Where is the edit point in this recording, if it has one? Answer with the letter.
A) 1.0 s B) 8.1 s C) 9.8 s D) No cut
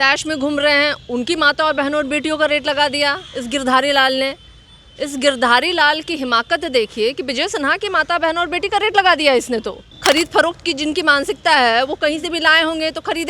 C